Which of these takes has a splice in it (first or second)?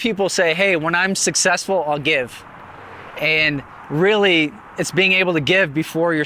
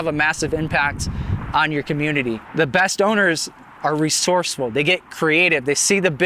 second